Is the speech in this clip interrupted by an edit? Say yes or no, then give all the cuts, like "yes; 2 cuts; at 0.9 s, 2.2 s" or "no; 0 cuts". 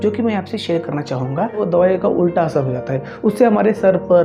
yes; 1 cut; at 1.6 s